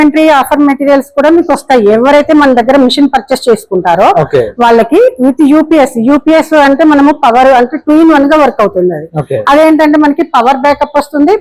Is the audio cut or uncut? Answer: uncut